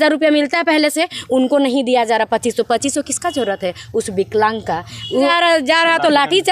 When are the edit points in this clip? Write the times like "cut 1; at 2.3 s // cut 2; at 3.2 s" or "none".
cut 1; at 5.3 s